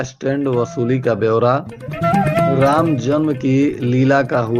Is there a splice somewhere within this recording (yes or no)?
no